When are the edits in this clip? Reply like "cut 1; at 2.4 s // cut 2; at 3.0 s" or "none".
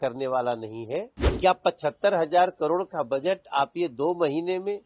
cut 1; at 1.2 s